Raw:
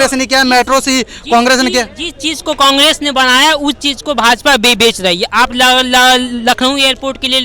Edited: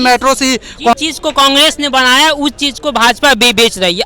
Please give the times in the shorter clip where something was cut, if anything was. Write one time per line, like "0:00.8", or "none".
0:00.9